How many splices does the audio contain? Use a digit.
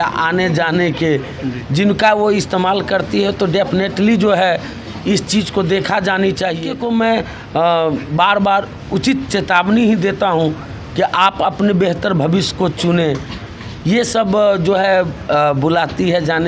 1